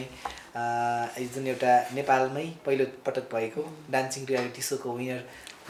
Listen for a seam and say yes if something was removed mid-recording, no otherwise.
no